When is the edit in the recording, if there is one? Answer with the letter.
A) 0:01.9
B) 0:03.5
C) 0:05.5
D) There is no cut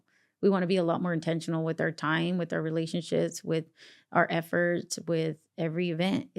D